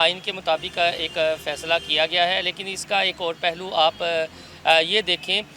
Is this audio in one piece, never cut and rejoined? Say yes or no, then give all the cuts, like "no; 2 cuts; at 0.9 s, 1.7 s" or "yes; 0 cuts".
yes; 0 cuts